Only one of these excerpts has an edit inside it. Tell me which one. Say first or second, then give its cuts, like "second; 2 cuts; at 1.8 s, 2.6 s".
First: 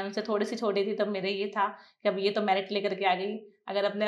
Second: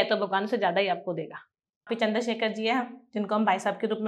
second; 1 cut; at 1.9 s